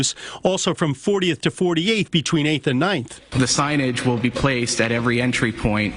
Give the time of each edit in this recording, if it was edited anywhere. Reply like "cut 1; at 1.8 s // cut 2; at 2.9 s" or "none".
none